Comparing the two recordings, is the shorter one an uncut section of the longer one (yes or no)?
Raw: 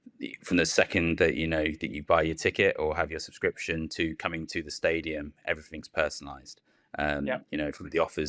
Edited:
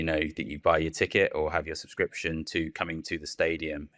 yes